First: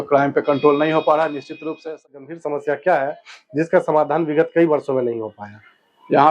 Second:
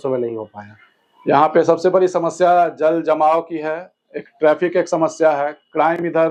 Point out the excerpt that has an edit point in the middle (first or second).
first